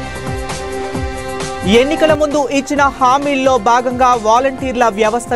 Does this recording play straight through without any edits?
no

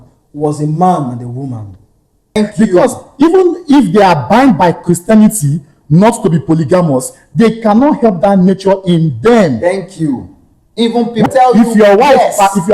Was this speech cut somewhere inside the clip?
yes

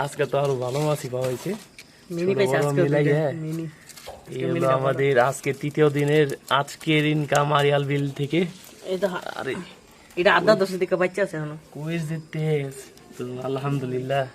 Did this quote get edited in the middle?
no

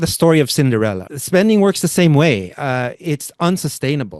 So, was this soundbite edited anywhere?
yes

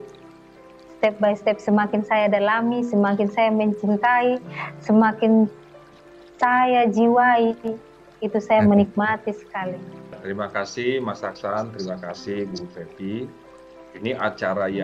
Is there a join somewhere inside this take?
yes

